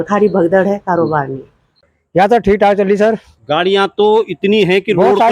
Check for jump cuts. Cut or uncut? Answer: cut